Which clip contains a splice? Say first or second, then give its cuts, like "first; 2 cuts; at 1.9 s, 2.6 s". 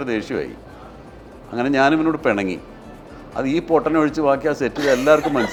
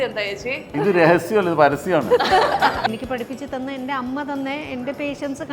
second; 1 cut; at 2.8 s